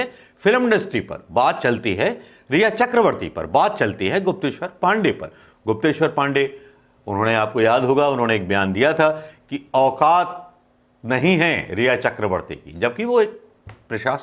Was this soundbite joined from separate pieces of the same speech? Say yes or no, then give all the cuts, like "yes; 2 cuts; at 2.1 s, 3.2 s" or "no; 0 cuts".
no; 0 cuts